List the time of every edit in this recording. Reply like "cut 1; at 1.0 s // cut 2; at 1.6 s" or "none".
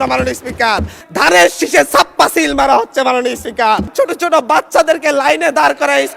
cut 1; at 1.0 s // cut 2; at 3.9 s